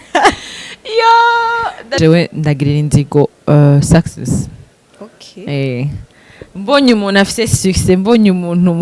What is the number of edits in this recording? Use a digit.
1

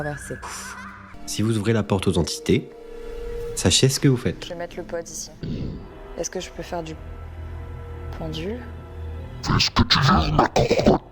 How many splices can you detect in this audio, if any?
2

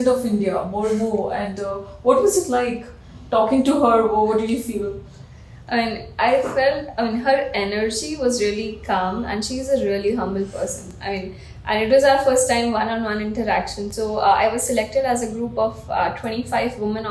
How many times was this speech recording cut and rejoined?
0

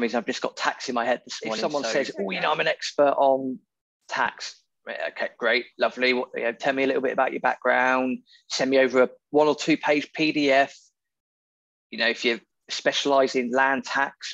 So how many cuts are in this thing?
1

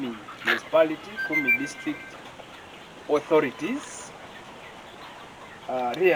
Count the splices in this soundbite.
0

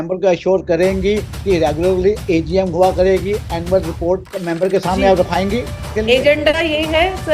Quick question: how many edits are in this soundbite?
1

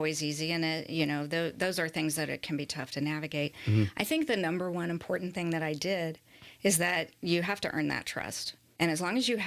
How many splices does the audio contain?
0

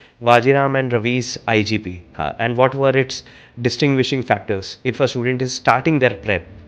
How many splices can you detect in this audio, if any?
1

